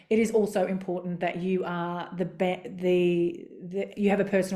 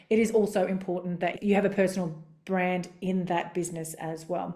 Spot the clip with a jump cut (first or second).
second